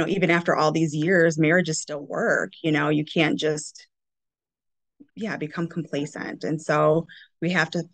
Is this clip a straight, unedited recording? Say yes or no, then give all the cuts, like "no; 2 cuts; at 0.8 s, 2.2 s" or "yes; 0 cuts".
yes; 0 cuts